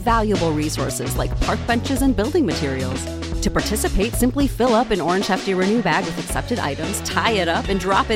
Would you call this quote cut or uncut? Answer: uncut